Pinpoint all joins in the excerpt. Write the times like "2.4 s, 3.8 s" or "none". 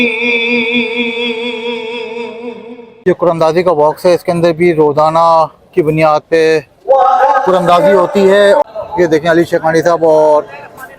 2.9 s, 8.6 s